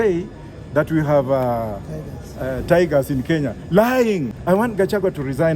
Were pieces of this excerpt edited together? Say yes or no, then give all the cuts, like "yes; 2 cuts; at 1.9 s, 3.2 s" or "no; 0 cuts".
yes; 1 cut; at 4.3 s